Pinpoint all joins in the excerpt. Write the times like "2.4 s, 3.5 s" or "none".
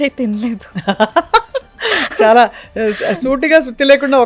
none